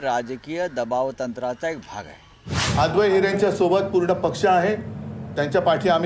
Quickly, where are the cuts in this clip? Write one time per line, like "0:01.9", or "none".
0:02.5